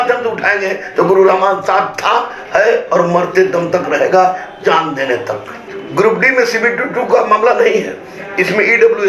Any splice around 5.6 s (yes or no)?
yes